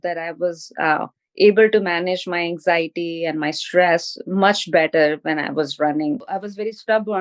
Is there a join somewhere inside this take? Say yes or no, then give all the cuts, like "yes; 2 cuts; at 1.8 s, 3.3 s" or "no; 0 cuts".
yes; 1 cut; at 6.2 s